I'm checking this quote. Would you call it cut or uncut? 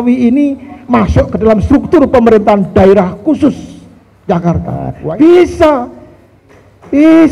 cut